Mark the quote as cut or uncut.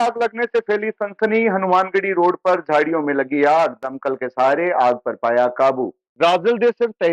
cut